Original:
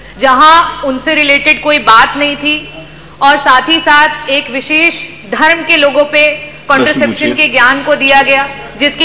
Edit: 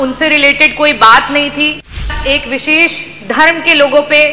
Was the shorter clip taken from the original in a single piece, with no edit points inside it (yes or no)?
no